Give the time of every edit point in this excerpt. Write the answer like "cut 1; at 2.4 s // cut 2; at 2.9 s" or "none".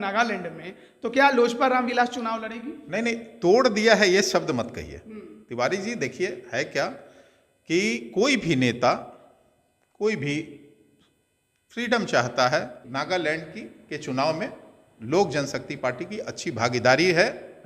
cut 1; at 12.8 s